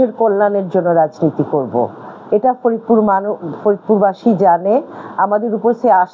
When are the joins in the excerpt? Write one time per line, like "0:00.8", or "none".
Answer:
none